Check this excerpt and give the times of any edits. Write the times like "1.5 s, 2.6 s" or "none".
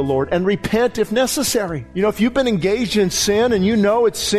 1.8 s

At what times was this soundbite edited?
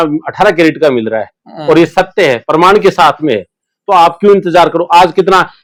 none

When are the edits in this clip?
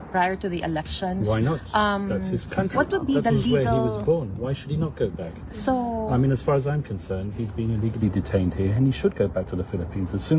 none

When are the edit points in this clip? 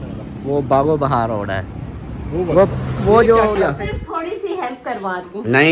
3.5 s

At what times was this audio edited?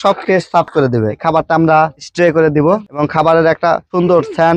1.1 s, 2.9 s

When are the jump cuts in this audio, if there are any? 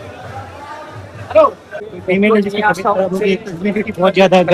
1.8 s

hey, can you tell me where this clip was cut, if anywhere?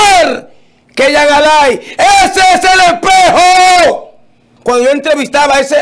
4.5 s

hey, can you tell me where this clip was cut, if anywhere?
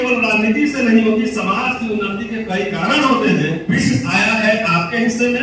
3.6 s

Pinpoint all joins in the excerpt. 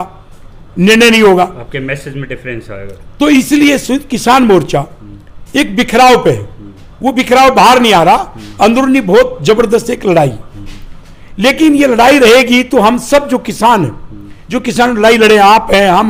none

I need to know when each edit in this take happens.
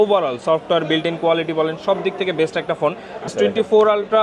3.3 s

